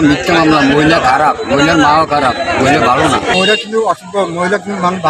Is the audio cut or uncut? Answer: uncut